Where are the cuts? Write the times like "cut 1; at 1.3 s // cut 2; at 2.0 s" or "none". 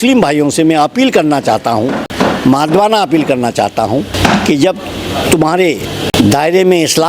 cut 1; at 2.1 s // cut 2; at 4.1 s // cut 3; at 6.1 s